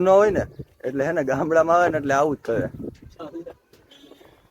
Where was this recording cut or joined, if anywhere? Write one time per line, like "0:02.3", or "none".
none